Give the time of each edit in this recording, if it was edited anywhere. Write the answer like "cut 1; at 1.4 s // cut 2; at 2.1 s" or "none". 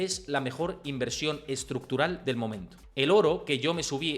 cut 1; at 2.7 s